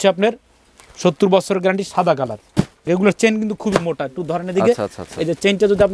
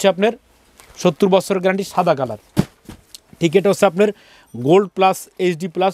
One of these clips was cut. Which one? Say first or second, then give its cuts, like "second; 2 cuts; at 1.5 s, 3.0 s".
first; 1 cut; at 2.9 s